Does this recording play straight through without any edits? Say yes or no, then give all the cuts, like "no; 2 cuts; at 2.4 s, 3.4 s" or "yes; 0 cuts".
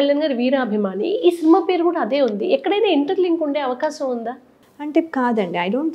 yes; 0 cuts